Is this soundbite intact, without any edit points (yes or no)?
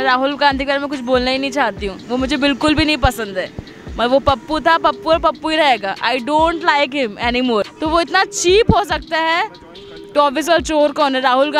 no